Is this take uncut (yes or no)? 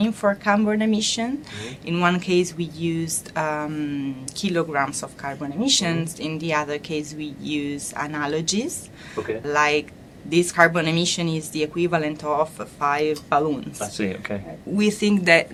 yes